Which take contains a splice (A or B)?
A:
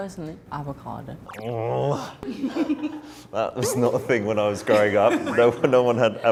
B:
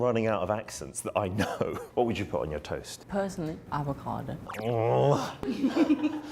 B